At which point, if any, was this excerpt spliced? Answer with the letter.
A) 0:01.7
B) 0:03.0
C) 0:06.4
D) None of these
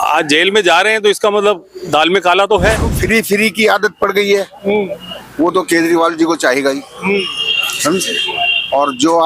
B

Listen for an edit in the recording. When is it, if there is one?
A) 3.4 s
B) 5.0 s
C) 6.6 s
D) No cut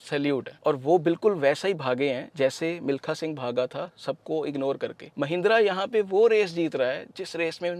B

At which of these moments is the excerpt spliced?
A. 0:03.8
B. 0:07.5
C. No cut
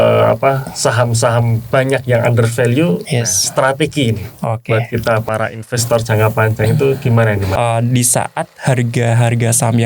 B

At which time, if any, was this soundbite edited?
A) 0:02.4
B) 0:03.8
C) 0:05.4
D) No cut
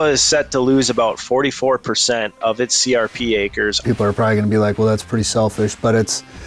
B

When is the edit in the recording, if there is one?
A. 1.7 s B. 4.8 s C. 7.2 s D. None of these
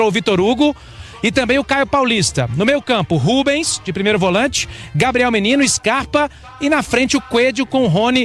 D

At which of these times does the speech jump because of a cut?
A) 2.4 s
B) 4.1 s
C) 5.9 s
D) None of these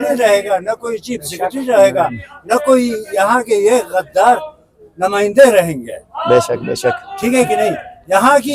D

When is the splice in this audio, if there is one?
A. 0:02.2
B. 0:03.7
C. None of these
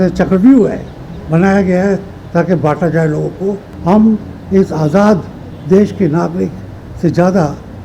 B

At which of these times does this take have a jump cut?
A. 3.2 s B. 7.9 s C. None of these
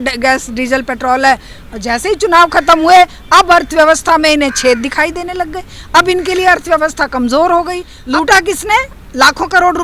B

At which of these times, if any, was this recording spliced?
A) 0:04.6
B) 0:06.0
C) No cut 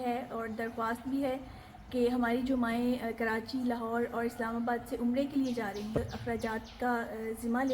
B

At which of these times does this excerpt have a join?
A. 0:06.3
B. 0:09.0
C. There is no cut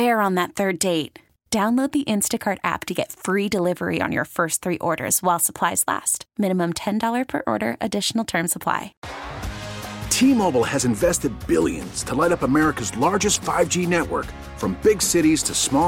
B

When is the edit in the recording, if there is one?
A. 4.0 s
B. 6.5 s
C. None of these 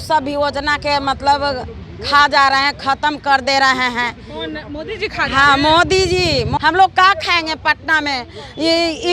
B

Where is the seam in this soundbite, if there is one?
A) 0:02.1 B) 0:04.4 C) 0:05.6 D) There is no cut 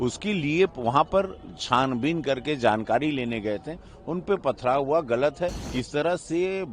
C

